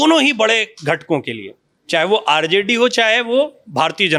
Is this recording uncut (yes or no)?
yes